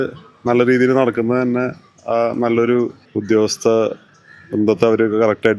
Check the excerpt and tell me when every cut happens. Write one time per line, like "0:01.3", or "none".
none